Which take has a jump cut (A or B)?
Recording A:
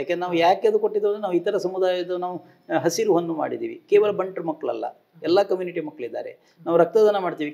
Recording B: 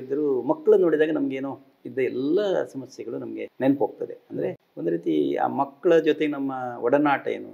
B